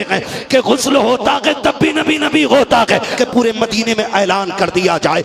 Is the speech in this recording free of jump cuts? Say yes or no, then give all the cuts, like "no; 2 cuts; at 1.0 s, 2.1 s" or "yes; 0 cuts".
no; 1 cut; at 3.1 s